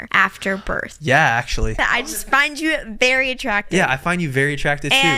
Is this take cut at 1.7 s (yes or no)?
yes